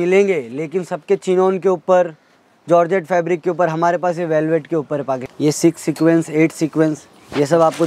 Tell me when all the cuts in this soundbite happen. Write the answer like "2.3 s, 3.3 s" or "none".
5.2 s